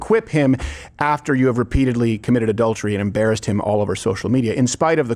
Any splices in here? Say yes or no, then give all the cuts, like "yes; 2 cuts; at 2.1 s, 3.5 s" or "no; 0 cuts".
no; 0 cuts